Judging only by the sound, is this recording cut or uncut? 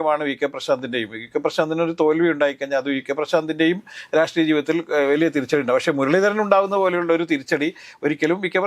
uncut